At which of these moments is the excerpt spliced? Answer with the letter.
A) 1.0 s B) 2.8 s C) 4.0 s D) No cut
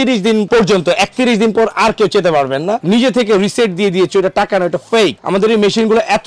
B